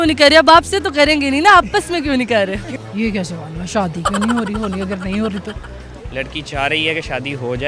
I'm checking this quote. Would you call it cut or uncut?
cut